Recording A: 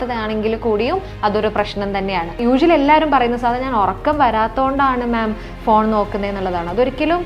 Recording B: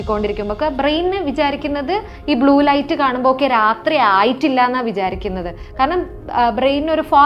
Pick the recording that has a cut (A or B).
A